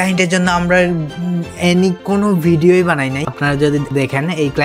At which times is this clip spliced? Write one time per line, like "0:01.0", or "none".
0:03.6